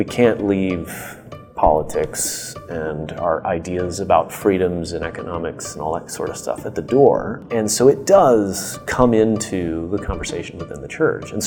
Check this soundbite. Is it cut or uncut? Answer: cut